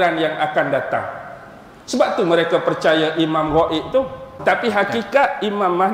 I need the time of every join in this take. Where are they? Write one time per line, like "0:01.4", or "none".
0:04.4

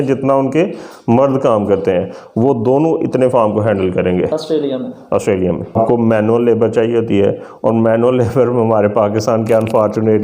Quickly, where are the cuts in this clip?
0:05.8

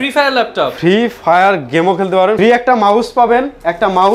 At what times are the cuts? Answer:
0:02.4

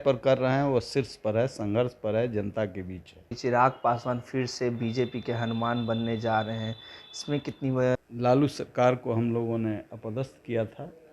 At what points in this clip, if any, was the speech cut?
0:03.3
0:07.9

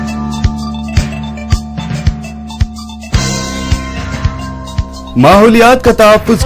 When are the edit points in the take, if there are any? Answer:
0:05.0

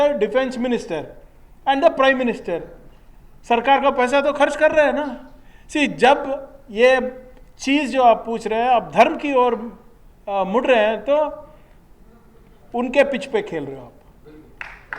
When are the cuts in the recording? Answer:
none

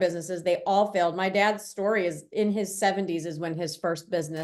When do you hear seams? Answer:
none

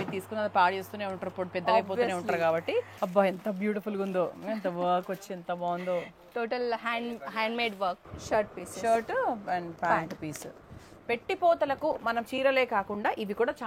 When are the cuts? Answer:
0:02.9
0:08.0

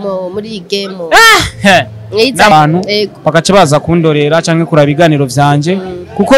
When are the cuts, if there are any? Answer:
0:02.5

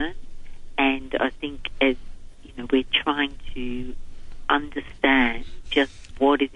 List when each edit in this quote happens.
none

